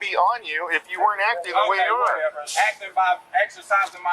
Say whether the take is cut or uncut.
uncut